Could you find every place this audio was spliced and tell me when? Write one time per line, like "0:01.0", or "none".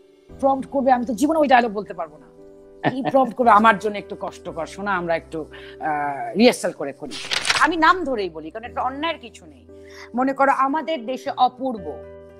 0:07.6